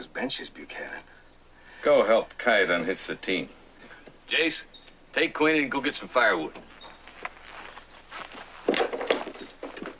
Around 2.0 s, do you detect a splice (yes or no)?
yes